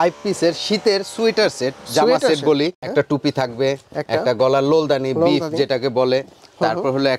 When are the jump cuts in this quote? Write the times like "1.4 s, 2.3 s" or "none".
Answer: 2.8 s